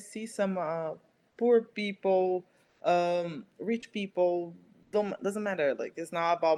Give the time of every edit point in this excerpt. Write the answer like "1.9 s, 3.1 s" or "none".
none